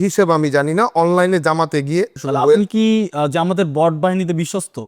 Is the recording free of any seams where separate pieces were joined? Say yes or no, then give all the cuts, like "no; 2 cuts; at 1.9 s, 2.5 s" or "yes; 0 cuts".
no; 1 cut; at 2.2 s